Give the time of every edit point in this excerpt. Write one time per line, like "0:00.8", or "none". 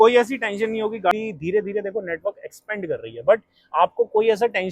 0:01.1

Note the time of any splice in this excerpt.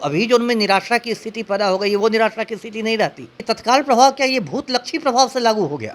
0:03.3

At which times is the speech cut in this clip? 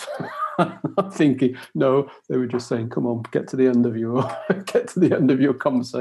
none

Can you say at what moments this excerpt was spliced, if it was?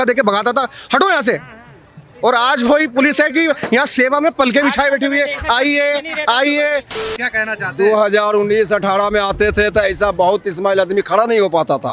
0:07.0

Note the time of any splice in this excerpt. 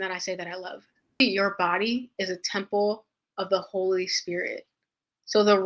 0:01.2

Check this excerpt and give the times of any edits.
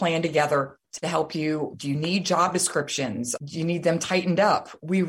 0:03.3

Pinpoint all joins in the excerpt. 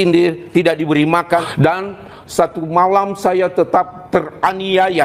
0:01.5

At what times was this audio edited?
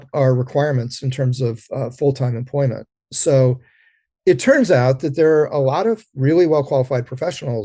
0:06.1

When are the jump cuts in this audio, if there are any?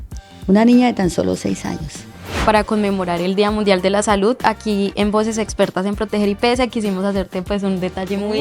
0:02.4

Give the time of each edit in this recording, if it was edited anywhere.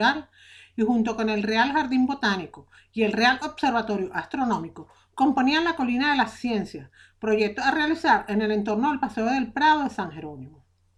none

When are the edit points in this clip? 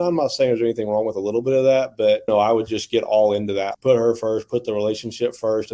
0:02.3
0:03.7

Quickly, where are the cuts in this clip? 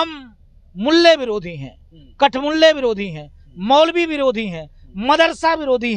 none

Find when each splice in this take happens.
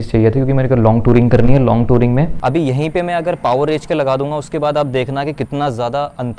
0:02.4

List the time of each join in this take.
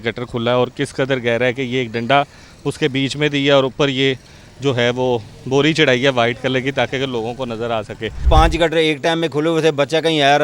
0:08.2

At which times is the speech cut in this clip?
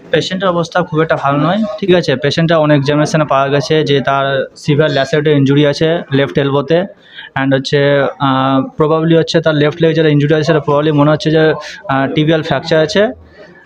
0:01.8

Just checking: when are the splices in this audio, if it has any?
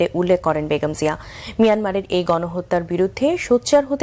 0:03.0

